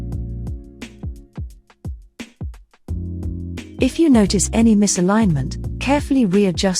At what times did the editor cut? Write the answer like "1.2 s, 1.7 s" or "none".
1.2 s, 3.8 s